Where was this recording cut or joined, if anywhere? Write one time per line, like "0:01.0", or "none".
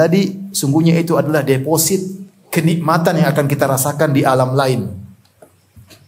none